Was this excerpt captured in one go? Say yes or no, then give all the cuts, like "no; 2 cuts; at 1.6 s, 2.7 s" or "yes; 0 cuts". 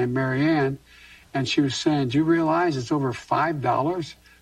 yes; 0 cuts